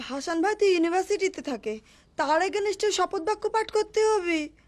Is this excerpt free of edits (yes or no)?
yes